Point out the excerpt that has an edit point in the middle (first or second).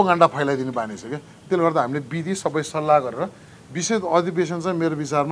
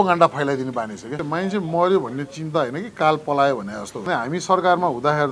second